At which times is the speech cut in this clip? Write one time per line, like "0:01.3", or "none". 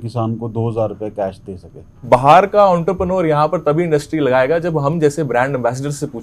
0:02.0